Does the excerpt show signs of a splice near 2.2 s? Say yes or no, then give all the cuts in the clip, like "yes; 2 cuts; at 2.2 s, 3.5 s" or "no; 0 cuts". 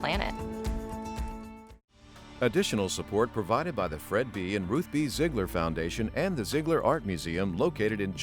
yes; 1 cut; at 2.2 s